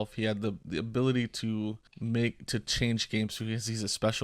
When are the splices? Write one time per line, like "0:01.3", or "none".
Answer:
0:01.9